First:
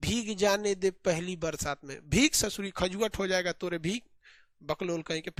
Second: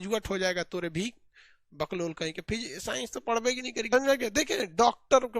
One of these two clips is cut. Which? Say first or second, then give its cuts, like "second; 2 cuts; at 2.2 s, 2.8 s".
second; 1 cut; at 3.9 s